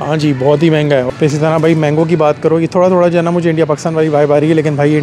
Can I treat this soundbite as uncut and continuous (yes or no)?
no